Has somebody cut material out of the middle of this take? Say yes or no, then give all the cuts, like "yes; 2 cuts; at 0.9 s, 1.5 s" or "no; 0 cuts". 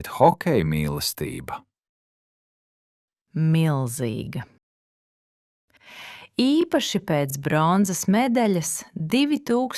no; 0 cuts